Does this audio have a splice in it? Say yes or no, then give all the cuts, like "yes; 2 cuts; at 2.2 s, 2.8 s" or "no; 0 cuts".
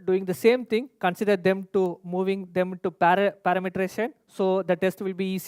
no; 0 cuts